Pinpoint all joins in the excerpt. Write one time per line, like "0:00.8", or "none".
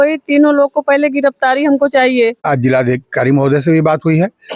0:02.4